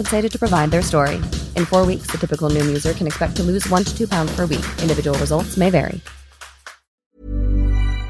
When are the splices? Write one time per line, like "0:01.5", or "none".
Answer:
0:07.1